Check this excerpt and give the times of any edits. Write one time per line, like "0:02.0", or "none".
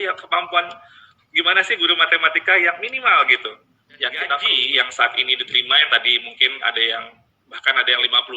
0:04.3